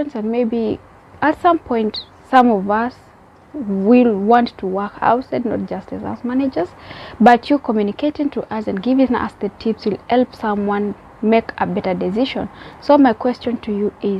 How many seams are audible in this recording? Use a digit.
0